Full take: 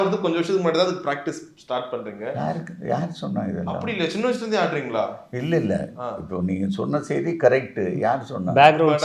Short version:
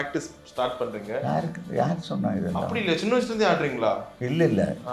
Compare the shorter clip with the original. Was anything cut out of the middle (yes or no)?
no